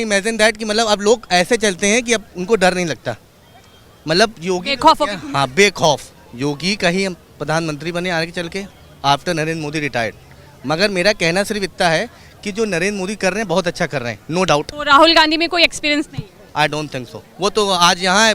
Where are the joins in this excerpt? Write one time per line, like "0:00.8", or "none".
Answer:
0:06.1
0:14.7